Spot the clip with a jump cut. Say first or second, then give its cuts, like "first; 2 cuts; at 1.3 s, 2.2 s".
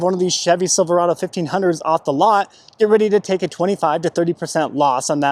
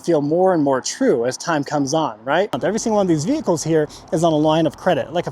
second; 1 cut; at 2.6 s